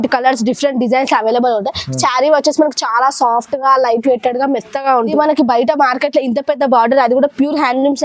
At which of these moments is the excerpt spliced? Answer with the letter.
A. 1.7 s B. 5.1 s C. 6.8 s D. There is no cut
B